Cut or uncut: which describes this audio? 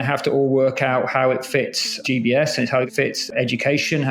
cut